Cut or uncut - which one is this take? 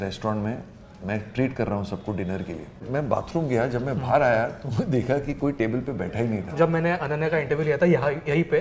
cut